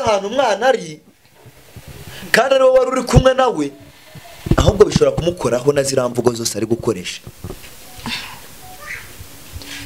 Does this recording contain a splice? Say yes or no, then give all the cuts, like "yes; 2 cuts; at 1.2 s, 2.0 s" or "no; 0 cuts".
no; 0 cuts